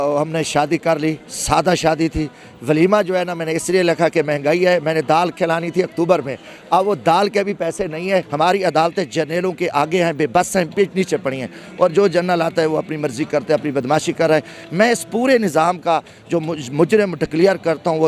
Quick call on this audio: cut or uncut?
cut